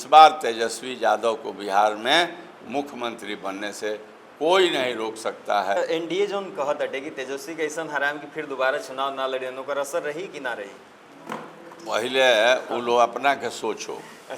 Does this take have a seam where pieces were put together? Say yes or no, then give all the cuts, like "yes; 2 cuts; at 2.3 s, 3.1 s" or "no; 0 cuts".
yes; 1 cut; at 5.8 s